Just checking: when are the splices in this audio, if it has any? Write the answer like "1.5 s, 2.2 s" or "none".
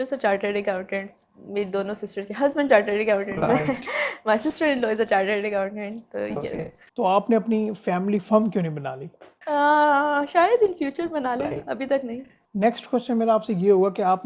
none